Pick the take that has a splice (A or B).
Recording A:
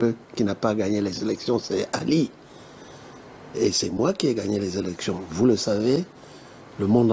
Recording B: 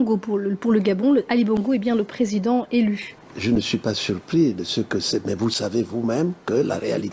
B